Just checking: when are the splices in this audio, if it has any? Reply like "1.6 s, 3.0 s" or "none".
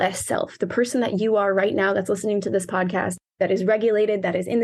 3.2 s